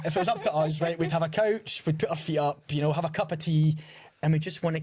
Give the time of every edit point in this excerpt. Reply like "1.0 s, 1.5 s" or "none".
none